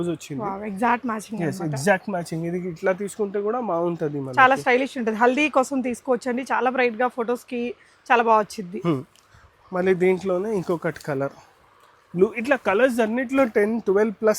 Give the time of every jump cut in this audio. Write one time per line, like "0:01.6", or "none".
none